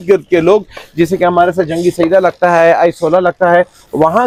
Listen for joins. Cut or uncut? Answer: uncut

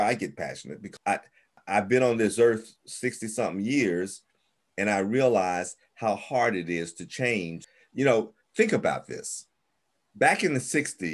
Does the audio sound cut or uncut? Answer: uncut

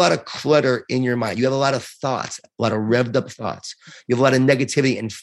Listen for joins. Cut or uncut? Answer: uncut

